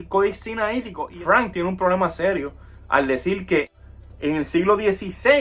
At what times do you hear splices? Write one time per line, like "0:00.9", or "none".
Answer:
0:01.0
0:03.8